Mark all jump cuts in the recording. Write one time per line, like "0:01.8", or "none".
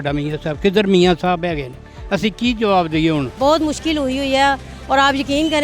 0:03.3